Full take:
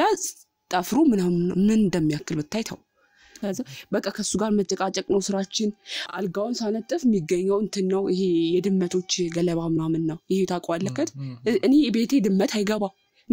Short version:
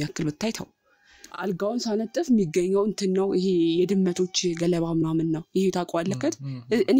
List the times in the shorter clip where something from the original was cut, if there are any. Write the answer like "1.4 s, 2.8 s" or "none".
1.1 s